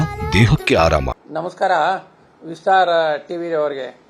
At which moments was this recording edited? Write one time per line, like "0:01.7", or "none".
0:01.1